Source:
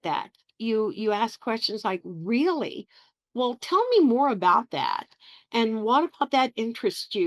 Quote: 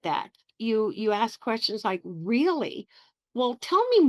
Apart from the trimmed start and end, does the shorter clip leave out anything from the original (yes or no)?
no